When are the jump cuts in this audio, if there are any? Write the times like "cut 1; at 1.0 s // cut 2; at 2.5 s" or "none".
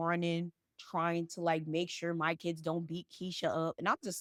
none